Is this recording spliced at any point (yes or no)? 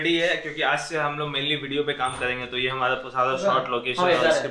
no